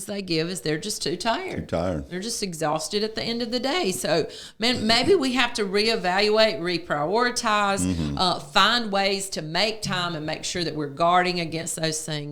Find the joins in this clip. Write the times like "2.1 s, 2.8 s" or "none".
none